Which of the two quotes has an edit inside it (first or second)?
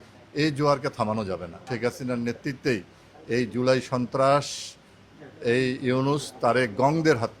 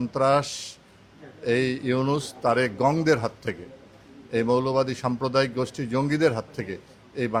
first